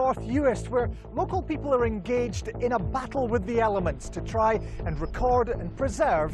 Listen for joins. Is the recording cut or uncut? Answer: uncut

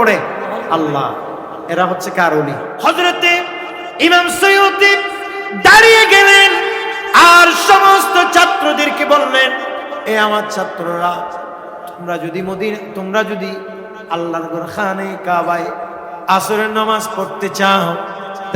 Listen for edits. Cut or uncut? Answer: cut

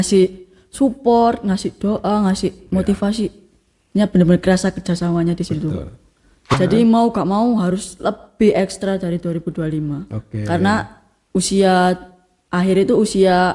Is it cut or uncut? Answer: cut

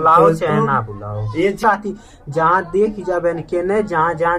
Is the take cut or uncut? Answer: cut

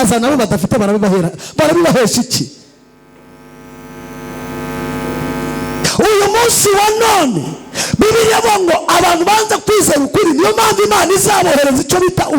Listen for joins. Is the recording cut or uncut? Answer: uncut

